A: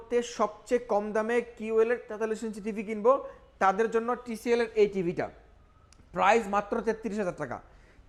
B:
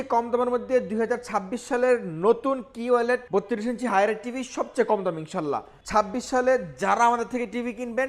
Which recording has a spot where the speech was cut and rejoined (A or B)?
B